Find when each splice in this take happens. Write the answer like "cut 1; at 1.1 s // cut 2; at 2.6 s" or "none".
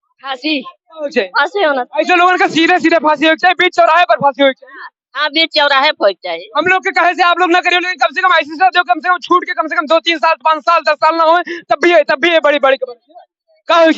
none